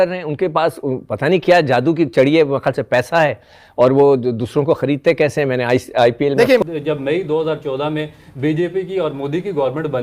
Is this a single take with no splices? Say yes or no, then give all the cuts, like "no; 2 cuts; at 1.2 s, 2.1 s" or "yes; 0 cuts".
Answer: no; 1 cut; at 6.6 s